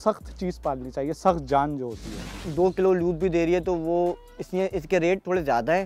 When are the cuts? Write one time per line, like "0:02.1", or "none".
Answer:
0:02.4